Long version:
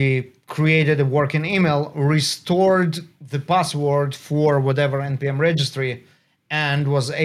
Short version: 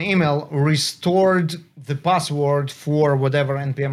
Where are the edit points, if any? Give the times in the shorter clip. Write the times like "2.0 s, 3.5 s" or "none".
none